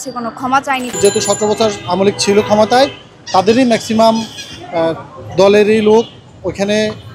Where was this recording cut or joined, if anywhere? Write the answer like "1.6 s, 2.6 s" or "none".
0.9 s